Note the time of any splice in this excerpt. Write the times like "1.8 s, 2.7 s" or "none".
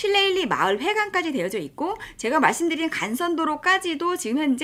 none

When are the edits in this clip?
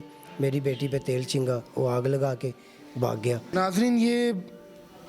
3.5 s

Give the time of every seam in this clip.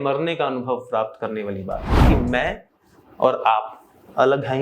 2.0 s

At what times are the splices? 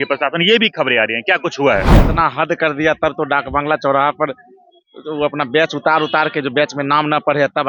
2.0 s

